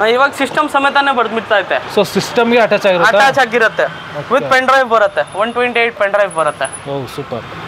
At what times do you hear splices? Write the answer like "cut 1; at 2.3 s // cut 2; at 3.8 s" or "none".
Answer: none